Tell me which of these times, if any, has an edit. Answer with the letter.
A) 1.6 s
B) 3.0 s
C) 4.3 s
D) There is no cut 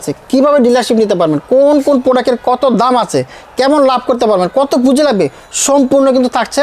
D